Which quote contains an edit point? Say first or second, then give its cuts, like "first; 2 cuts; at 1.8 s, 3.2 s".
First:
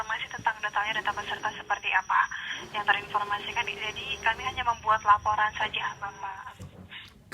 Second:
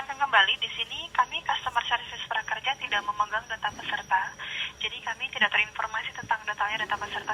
first; 1 cut; at 6.4 s